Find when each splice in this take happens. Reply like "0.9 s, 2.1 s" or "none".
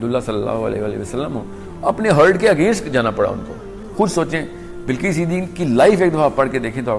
3.8 s